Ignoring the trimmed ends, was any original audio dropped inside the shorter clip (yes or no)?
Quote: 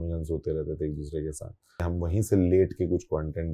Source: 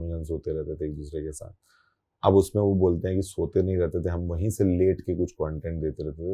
yes